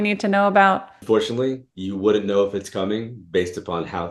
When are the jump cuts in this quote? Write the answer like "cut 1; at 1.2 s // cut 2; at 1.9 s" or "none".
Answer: cut 1; at 0.9 s